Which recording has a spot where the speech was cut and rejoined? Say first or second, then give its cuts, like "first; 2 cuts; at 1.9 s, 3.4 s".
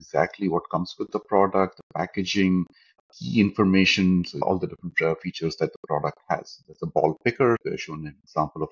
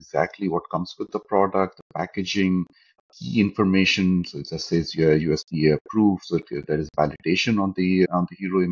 first; 2 cuts; at 4.4 s, 7.6 s